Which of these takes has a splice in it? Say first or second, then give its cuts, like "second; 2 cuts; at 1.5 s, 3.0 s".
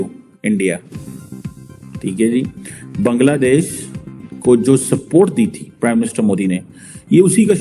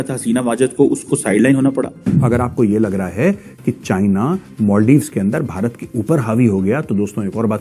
second; 1 cut; at 2.1 s